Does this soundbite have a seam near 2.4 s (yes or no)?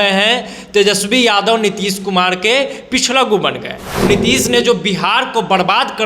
no